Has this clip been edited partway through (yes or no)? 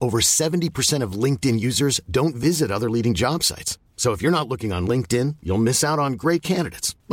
no